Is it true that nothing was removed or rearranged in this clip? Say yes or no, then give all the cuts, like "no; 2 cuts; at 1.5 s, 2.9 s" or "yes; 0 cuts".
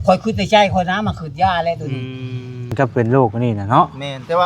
no; 1 cut; at 2.7 s